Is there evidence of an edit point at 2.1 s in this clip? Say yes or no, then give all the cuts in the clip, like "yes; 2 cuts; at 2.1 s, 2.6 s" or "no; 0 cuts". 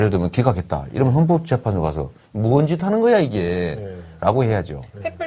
no; 0 cuts